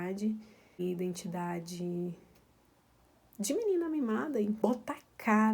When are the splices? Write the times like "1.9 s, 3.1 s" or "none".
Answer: 0.8 s, 4.6 s

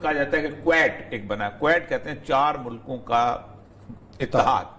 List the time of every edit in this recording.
none

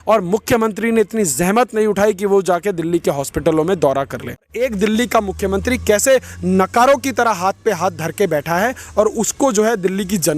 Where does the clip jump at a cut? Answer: 4.5 s

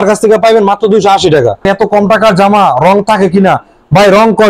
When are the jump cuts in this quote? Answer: 1.6 s

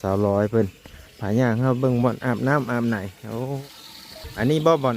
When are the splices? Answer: 3.6 s

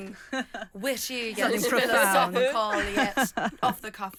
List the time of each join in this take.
none

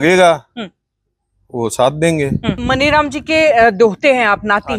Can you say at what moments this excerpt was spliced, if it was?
2.6 s

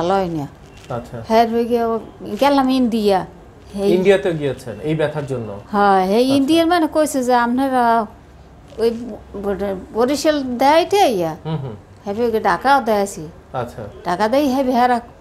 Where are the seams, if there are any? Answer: none

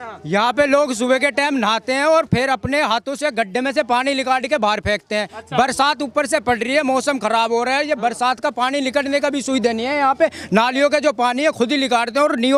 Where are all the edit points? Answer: none

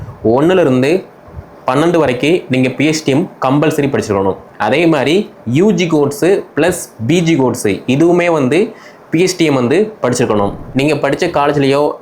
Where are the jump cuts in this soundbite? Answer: 10.6 s

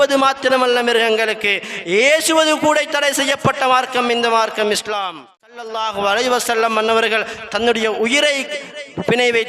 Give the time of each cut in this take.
5.6 s

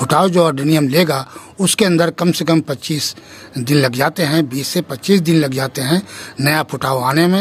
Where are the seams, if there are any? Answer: none

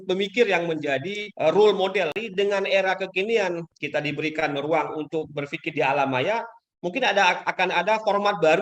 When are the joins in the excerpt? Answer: 1.2 s, 2.2 s, 3.7 s

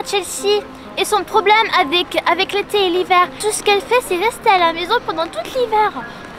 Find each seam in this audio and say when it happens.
3.4 s

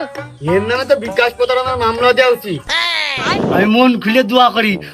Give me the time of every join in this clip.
3.6 s

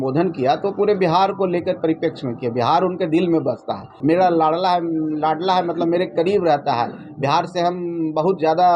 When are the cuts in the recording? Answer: 3.8 s

